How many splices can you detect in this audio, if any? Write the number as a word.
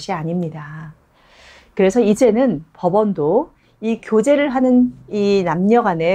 zero